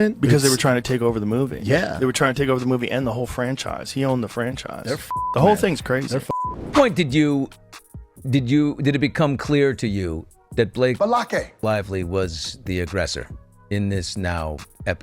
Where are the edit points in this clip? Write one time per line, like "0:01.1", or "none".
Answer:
0:06.5